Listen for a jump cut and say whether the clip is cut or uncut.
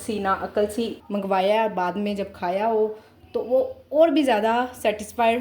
cut